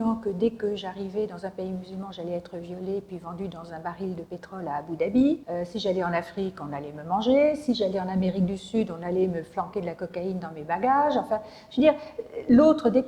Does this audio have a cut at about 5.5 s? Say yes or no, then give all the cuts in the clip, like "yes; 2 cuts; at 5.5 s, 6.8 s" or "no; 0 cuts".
yes; 1 cut; at 5.5 s